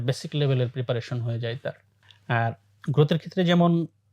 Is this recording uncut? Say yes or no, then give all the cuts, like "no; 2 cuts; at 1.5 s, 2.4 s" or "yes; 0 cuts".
yes; 0 cuts